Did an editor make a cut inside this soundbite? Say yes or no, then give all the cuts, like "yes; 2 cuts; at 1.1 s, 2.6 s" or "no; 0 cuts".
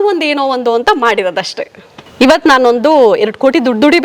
yes; 1 cut; at 2.0 s